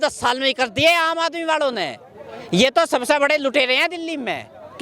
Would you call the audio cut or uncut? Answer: uncut